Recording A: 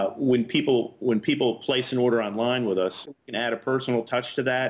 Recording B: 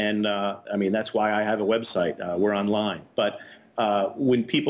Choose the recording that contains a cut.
A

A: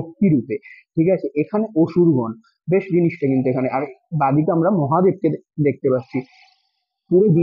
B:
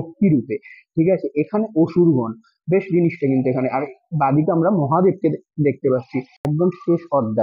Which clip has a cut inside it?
B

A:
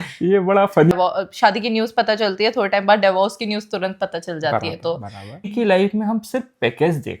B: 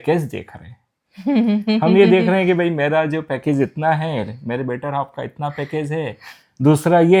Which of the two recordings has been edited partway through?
A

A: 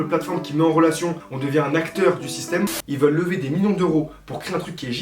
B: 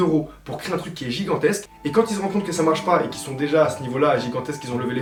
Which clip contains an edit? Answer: A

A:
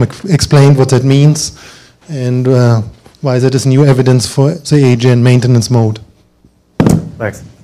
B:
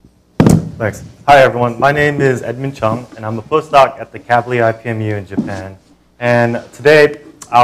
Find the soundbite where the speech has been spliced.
B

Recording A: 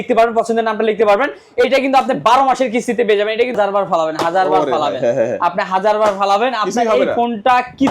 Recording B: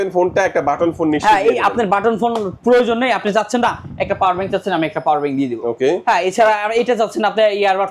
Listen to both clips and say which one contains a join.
A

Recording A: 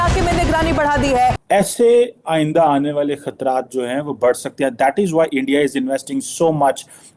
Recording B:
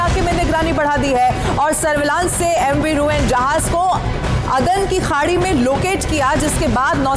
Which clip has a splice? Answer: A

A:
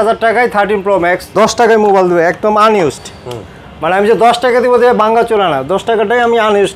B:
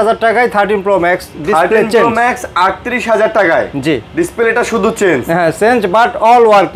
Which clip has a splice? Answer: A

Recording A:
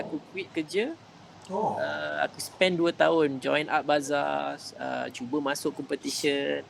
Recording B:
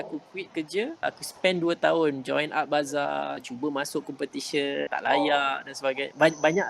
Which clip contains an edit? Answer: B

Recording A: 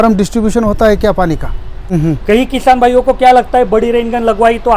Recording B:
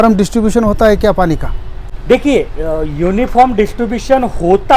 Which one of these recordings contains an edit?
A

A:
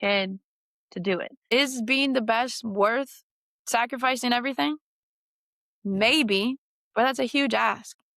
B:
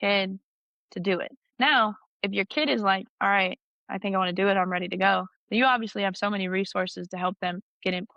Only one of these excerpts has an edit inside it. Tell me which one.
A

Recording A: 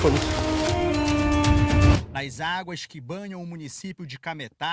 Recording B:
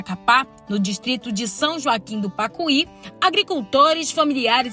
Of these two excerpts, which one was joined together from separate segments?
A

